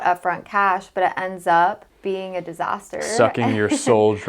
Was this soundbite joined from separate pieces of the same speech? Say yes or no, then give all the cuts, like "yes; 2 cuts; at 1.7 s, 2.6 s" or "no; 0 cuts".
yes; 1 cut; at 1.9 s